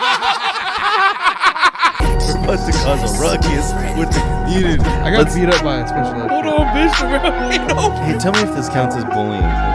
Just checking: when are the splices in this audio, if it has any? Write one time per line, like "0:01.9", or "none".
0:01.9